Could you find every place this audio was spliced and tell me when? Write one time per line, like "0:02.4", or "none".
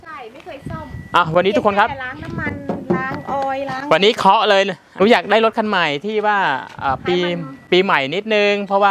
0:04.8